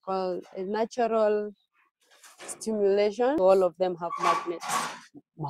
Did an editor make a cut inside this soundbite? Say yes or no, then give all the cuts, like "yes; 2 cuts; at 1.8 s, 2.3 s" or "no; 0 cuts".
yes; 1 cut; at 3.4 s